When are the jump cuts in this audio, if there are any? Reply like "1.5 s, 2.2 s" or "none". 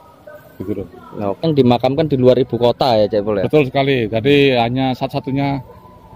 1.4 s